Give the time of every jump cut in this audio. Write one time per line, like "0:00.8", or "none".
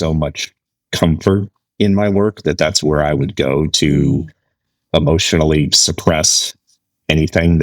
none